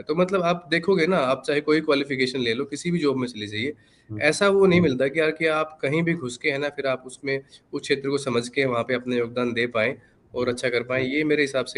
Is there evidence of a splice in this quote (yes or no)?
no